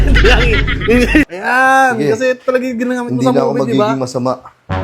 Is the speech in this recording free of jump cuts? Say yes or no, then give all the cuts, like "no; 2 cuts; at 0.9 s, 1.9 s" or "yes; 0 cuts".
no; 1 cut; at 1.3 s